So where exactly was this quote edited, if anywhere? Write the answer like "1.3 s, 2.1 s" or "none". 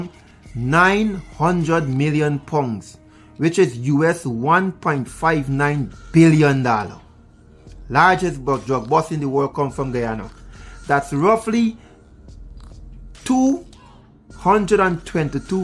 none